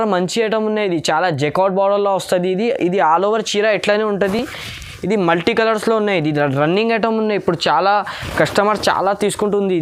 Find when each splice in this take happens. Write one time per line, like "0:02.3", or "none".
none